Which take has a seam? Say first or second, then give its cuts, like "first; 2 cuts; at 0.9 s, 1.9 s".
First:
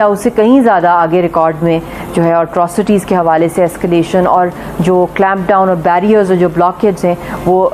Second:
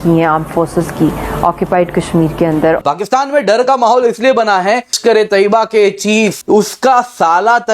second; 3 cuts; at 2.8 s, 5.0 s, 6.4 s